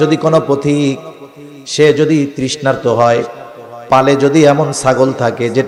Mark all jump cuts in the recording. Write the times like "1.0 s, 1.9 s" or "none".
none